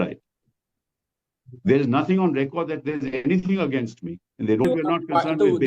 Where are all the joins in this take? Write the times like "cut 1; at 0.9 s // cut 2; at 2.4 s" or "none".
cut 1; at 4.6 s